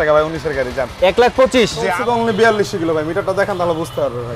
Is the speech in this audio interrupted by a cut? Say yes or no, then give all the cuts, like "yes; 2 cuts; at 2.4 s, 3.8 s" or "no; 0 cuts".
yes; 1 cut; at 1.8 s